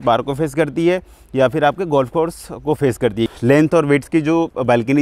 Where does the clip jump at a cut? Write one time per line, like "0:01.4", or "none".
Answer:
0:03.3